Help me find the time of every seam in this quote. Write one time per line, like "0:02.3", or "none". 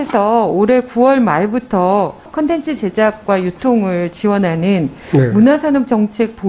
0:02.3